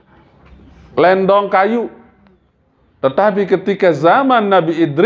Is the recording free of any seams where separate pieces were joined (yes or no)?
yes